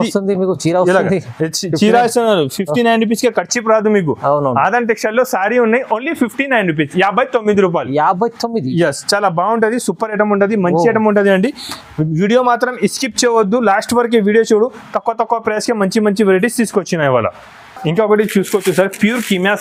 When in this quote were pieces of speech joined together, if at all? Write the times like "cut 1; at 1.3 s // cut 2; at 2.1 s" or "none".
none